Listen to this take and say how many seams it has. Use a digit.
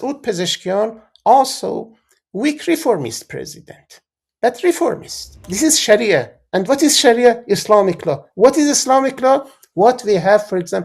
1